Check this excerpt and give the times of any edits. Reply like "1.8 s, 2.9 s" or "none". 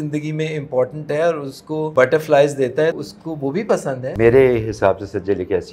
1.9 s, 2.9 s, 4.1 s